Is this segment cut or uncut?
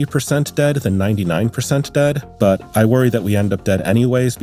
uncut